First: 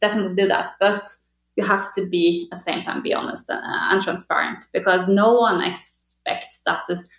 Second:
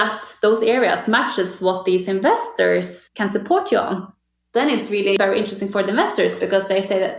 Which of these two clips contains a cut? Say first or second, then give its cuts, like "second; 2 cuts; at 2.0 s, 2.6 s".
second; 2 cuts; at 3.0 s, 5.2 s